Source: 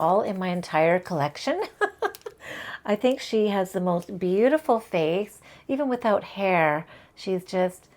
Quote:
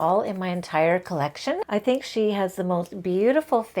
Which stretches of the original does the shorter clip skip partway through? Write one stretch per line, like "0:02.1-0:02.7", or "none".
0:01.6-0:02.8